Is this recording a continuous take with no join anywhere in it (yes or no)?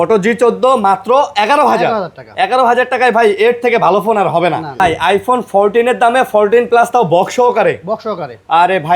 no